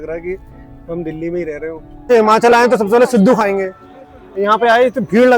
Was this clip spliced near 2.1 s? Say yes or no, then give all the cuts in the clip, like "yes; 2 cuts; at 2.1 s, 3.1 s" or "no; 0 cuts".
yes; 1 cut; at 2.1 s